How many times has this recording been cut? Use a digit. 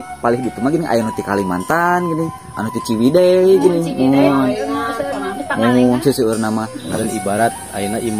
1